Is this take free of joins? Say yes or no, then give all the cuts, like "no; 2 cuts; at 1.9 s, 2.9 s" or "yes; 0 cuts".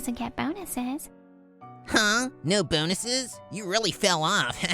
no; 1 cut; at 1.7 s